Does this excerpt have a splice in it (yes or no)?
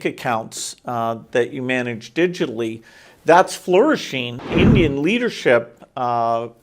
yes